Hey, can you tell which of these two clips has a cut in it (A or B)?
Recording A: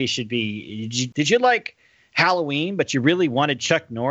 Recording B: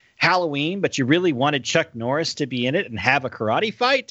A